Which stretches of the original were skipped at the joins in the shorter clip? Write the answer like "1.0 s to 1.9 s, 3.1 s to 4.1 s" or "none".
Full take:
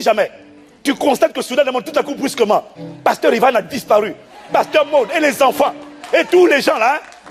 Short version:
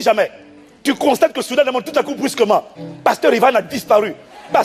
none